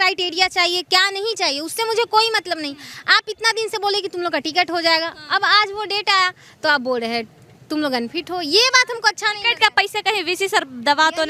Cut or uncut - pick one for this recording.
uncut